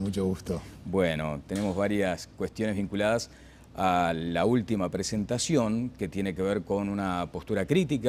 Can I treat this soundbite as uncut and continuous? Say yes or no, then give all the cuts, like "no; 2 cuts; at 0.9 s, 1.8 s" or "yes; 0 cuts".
yes; 0 cuts